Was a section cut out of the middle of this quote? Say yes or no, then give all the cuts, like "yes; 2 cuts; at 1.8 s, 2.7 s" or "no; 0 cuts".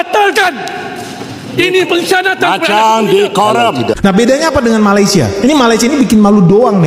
yes; 1 cut; at 4.0 s